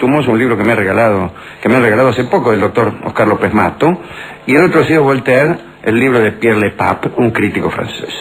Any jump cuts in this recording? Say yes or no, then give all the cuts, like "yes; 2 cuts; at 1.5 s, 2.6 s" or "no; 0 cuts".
yes; 1 cut; at 4.7 s